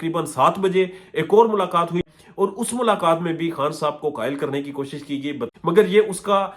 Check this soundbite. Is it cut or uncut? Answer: cut